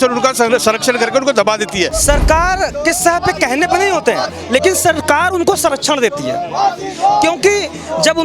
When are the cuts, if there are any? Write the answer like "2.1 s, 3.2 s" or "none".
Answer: 2.0 s